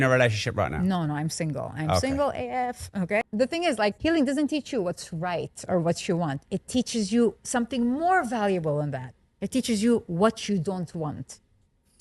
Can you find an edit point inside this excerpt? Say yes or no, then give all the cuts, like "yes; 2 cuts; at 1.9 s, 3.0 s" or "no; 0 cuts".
yes; 1 cut; at 3.2 s